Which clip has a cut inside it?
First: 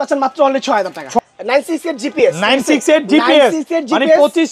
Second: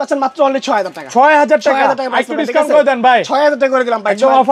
first; 1 cut; at 1.2 s

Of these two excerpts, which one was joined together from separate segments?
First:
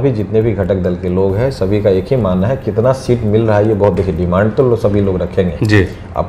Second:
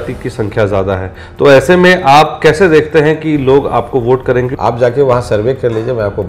second; 1 cut; at 4.5 s

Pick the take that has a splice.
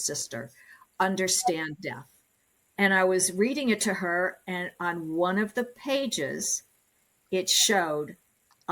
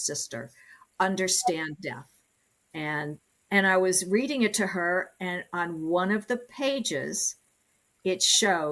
first; 1 cut; at 2.6 s

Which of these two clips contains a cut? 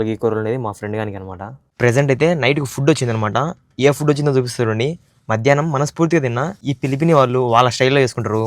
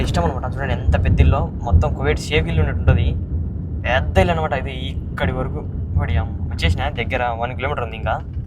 first; 2 cuts; at 1.6 s, 6.6 s

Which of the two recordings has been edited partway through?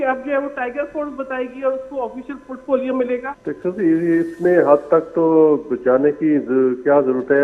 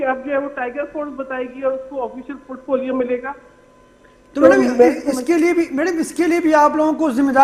first; 1 cut; at 3.3 s

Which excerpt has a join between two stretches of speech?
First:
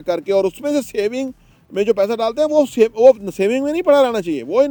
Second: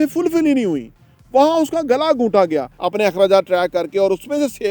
second; 1 cut; at 2.7 s

